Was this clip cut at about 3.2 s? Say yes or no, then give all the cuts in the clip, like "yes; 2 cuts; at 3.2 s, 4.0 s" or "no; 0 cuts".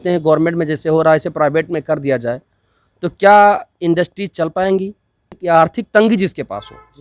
no; 1 cut; at 5.4 s